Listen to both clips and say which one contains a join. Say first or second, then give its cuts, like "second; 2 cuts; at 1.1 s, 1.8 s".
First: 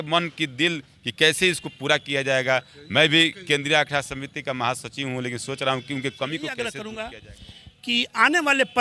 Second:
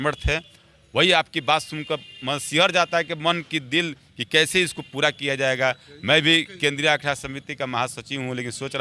first; 1 cut; at 6.7 s